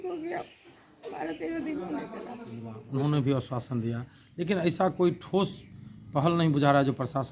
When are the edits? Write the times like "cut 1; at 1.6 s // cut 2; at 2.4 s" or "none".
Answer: cut 1; at 2.8 s